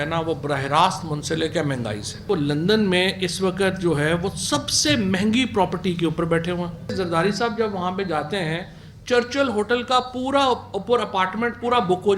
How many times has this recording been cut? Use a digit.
2